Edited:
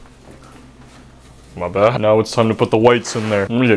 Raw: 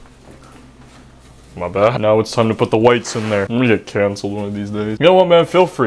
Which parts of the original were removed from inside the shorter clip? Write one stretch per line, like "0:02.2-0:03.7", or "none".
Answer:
none